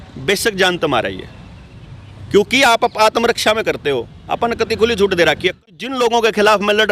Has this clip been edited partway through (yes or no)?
yes